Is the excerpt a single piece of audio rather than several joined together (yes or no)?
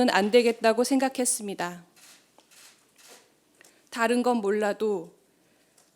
no